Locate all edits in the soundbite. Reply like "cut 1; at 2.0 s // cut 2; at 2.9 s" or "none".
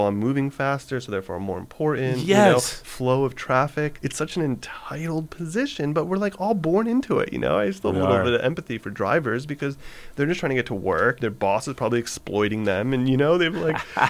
cut 1; at 3.9 s // cut 2; at 11.2 s